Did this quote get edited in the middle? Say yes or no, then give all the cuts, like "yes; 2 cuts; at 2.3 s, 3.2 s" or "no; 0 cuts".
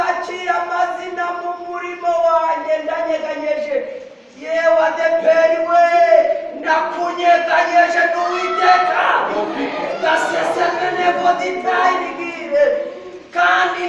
no; 0 cuts